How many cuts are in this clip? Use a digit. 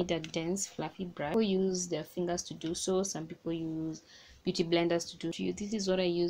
2